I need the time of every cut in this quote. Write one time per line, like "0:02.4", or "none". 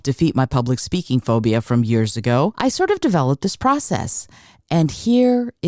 0:02.5